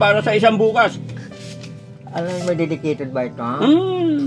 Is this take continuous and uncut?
yes; 0 cuts

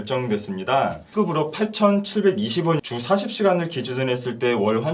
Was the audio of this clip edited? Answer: yes; 2 cuts; at 1.1 s, 2.8 s

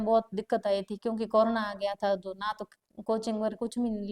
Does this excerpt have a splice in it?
no; 0 cuts

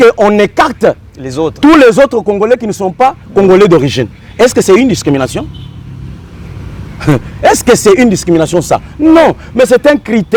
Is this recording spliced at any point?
no; 0 cuts

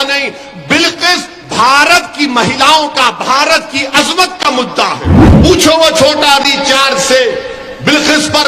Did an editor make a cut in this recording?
yes; 1 cut; at 5.2 s

